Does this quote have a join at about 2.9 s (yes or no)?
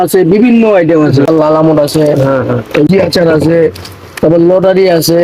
yes